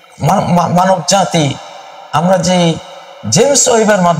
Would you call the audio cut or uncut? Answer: uncut